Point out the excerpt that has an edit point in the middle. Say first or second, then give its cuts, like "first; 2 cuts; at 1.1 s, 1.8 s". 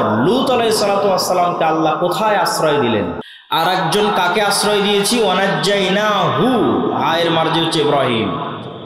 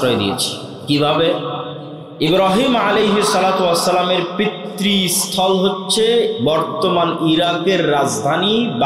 first; 1 cut; at 3.2 s